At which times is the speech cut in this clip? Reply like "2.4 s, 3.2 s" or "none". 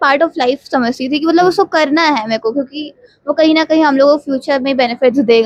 none